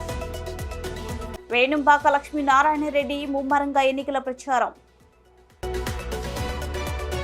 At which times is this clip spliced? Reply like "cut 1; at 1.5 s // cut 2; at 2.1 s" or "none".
cut 1; at 1.3 s